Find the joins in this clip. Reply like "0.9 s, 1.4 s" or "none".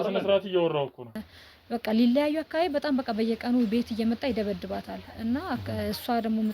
1.2 s